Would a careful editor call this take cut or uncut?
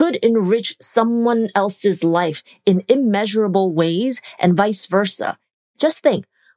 cut